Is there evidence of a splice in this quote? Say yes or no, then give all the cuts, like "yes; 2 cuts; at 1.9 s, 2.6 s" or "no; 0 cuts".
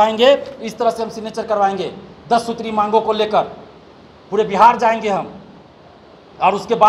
no; 0 cuts